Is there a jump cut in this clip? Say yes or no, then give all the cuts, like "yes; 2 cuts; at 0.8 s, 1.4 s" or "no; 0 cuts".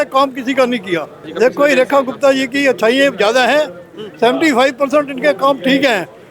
yes; 1 cut; at 1.2 s